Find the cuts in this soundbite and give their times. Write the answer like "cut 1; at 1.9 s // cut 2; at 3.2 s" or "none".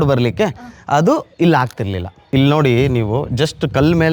cut 1; at 2.2 s